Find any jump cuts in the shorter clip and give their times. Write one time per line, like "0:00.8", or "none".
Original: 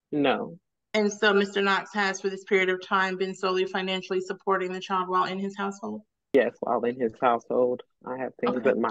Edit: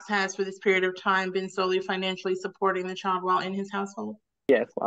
none